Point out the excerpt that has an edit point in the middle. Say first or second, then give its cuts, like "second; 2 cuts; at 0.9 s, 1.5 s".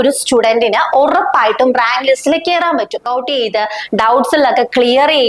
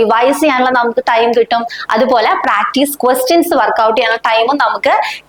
first; 1 cut; at 3.0 s